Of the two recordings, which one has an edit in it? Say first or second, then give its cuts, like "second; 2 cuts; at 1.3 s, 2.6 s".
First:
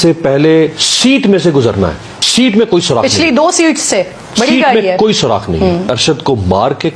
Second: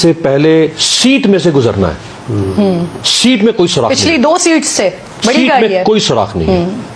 first; 2 cuts; at 2.1 s, 5.9 s